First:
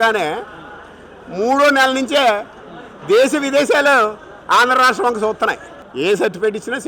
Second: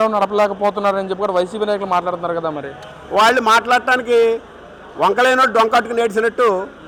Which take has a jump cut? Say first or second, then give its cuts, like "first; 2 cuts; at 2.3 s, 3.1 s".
first; 1 cut; at 5.8 s